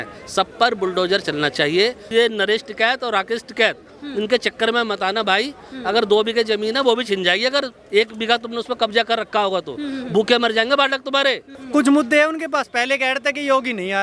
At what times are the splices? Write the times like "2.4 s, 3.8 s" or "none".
2.0 s, 11.5 s